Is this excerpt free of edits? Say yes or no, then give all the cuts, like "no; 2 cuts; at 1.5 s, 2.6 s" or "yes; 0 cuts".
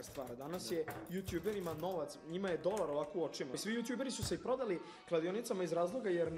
no; 1 cut; at 3.6 s